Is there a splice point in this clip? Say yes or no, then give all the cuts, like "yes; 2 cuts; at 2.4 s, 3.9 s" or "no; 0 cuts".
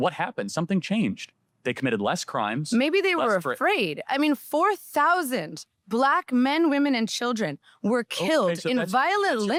no; 0 cuts